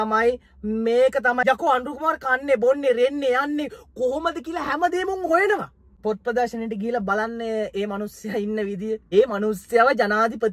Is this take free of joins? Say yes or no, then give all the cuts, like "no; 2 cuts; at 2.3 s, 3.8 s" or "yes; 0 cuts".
no; 3 cuts; at 1.4 s, 5.9 s, 9.0 s